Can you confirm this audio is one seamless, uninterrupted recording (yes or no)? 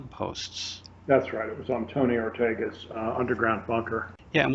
yes